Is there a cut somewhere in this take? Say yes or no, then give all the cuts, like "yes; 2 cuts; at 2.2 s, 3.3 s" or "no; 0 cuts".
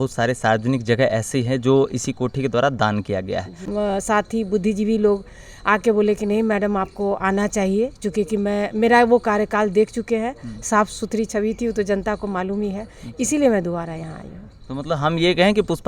yes; 1 cut; at 3.6 s